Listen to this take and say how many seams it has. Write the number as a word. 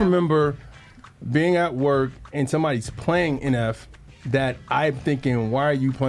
zero